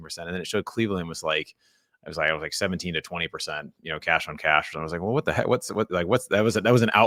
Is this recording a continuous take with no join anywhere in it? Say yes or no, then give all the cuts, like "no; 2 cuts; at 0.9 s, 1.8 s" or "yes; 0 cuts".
yes; 0 cuts